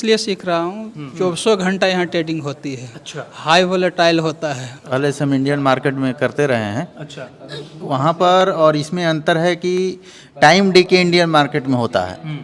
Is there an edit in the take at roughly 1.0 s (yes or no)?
yes